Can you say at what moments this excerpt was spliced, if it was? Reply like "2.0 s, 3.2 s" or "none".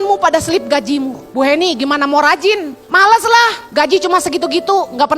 1.2 s, 2.8 s, 3.6 s